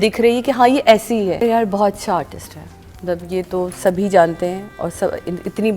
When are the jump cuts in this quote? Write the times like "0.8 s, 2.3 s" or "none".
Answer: 1.4 s